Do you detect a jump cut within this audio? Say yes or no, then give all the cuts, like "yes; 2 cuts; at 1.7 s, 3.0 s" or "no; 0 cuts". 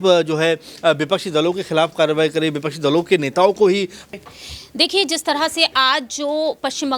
yes; 1 cut; at 4.1 s